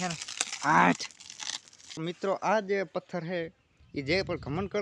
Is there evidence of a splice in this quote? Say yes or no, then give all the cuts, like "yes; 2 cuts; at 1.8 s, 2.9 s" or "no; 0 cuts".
yes; 1 cut; at 2.0 s